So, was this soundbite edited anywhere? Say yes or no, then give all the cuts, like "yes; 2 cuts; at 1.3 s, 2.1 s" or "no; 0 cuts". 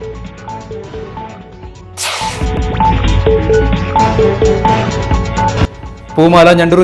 yes; 1 cut; at 1.7 s